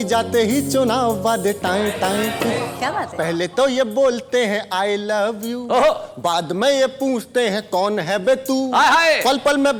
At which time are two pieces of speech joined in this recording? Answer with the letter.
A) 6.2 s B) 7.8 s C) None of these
C